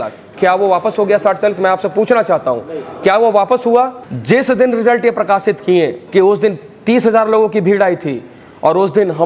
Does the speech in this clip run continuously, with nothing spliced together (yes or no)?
no